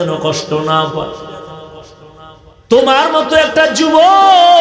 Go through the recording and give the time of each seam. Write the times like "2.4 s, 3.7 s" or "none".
2.5 s